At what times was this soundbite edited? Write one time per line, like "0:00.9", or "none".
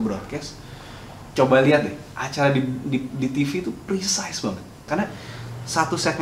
0:04.8